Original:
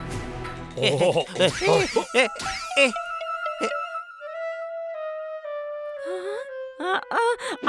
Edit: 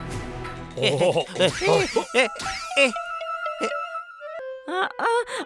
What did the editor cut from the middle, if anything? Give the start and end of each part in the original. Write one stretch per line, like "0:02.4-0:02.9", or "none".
0:04.4-0:06.5